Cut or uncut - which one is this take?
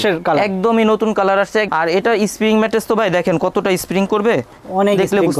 cut